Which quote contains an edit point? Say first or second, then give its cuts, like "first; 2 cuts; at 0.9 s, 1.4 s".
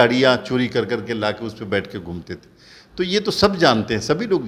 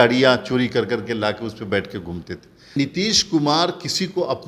second; 1 cut; at 2.8 s